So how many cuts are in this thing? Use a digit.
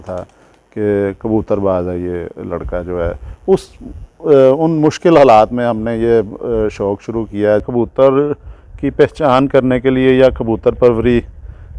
1